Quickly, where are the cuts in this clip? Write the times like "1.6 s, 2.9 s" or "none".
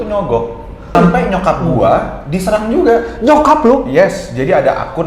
0.9 s